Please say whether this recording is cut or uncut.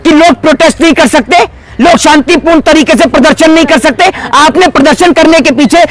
uncut